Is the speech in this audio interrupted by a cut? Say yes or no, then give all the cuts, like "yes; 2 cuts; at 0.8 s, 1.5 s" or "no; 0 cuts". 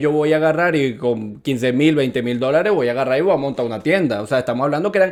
no; 0 cuts